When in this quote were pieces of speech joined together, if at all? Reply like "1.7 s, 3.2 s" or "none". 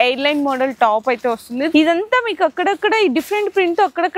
1.7 s